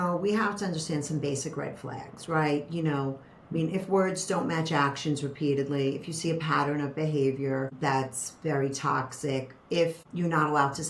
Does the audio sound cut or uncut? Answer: cut